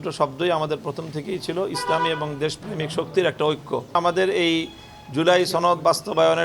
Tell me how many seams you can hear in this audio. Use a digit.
1